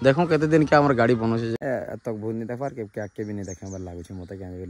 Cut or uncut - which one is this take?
cut